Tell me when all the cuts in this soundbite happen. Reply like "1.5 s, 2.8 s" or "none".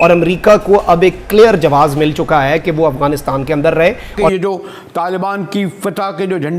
4.3 s